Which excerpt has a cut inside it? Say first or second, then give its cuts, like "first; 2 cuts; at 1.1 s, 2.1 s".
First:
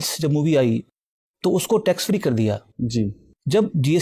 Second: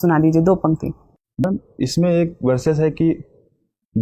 second; 1 cut; at 1.4 s